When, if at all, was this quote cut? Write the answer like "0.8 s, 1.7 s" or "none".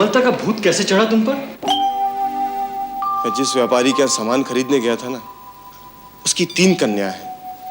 none